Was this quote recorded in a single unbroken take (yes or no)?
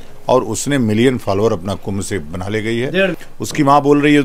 no